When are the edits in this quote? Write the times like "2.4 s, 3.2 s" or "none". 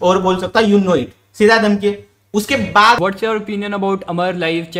3.0 s

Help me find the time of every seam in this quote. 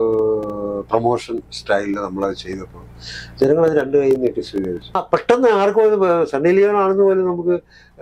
5.0 s

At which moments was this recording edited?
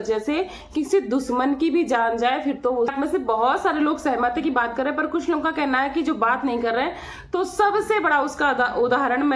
2.9 s

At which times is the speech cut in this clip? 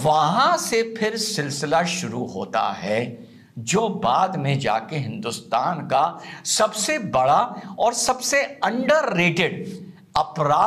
none

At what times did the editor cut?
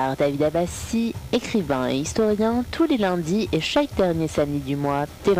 none

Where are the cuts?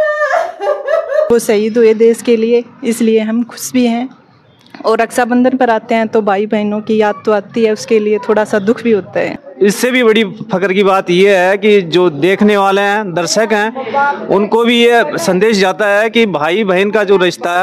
1.3 s, 9.4 s

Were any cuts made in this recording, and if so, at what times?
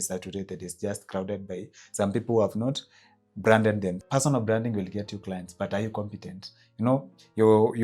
4.0 s

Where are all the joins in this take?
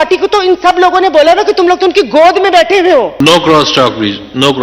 3.2 s

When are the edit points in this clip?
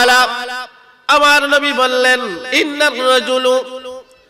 2.4 s

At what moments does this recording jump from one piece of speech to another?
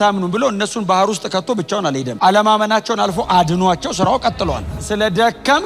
4.7 s

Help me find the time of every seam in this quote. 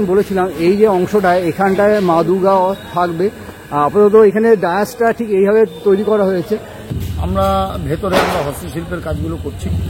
6.9 s

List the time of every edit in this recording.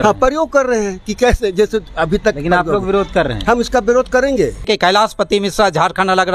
4.6 s

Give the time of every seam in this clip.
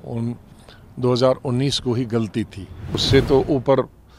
3.0 s

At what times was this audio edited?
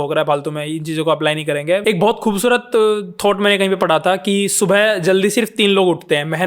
1.8 s

